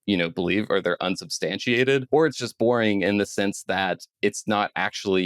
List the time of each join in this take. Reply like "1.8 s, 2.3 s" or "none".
2.0 s